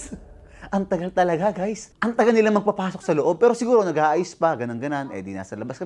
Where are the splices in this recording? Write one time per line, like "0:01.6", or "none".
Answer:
0:01.9